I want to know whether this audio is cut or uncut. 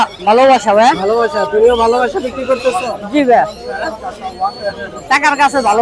uncut